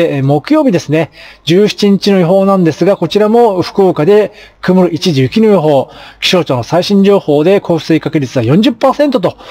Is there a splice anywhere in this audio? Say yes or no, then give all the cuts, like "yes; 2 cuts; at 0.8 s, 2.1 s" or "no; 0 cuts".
no; 0 cuts